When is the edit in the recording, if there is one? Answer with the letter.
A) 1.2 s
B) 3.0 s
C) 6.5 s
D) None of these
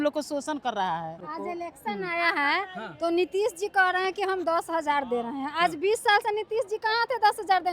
A